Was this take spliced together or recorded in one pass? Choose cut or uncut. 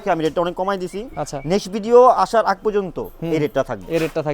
uncut